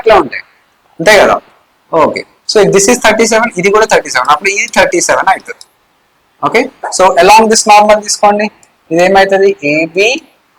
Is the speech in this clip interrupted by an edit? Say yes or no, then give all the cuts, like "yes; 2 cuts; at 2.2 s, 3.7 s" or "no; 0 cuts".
no; 0 cuts